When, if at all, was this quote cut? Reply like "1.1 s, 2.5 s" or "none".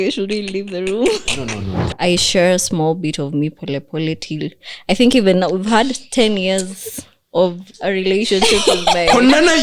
1.8 s